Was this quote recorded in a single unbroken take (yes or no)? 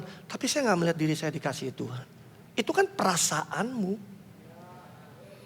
yes